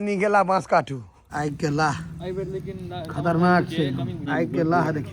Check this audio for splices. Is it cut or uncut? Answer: cut